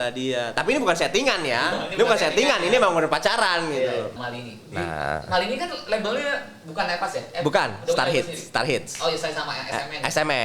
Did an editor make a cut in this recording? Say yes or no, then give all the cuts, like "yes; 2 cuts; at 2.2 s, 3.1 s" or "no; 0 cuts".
yes; 1 cut; at 4.2 s